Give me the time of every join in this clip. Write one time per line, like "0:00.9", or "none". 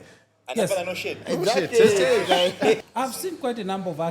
0:02.8

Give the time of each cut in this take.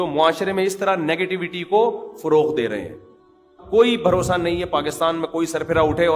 0:03.6

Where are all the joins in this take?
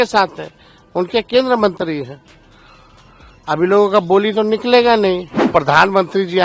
0:05.4

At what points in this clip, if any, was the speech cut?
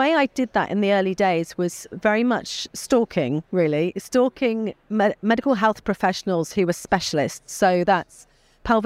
none

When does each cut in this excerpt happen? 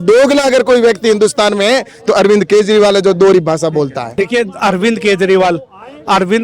0:04.0

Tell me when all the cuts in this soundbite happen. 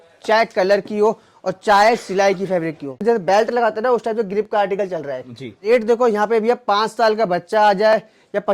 0:03.0
0:05.7

